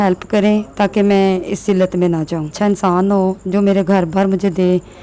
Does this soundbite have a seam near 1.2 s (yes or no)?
no